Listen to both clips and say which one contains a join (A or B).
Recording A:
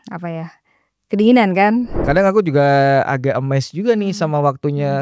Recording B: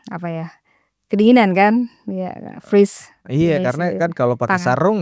A